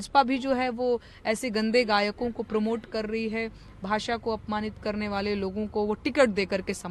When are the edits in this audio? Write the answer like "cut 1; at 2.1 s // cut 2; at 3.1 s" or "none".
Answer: none